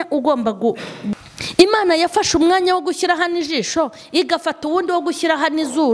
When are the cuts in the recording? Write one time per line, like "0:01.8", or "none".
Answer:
0:01.1